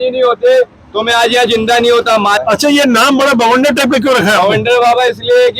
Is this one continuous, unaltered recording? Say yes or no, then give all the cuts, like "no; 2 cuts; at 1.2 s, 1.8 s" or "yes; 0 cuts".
no; 1 cut; at 2.4 s